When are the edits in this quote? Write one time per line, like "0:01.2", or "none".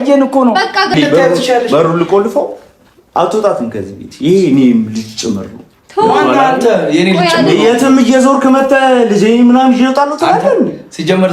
0:00.9